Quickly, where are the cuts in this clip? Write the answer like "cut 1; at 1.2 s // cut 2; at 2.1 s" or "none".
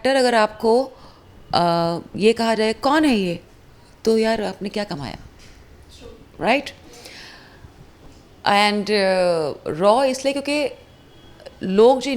none